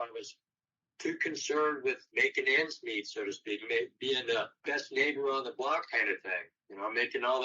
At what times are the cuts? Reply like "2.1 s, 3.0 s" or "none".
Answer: 2.0 s, 4.5 s